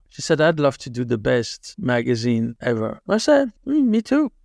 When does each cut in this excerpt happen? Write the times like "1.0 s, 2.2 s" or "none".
2.9 s